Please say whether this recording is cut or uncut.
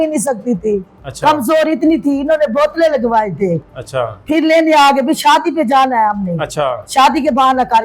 uncut